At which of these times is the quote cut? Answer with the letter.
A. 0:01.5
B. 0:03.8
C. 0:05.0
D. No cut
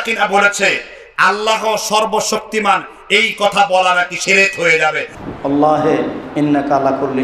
C